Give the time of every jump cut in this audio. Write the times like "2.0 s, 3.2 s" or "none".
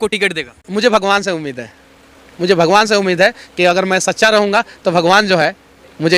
none